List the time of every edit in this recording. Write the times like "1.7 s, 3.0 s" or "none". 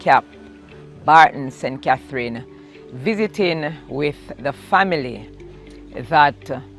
4.3 s